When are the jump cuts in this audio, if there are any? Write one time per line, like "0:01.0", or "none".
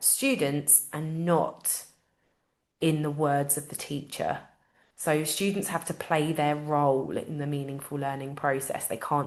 none